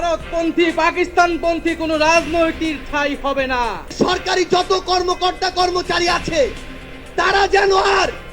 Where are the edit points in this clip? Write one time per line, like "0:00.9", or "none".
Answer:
0:03.9